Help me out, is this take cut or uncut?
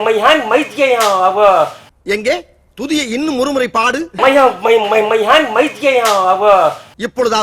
cut